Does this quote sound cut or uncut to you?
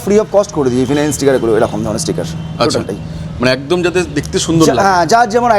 uncut